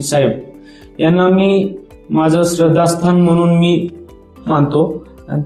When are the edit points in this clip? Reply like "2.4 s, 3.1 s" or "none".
none